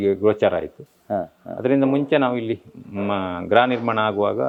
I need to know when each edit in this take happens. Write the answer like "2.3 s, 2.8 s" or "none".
none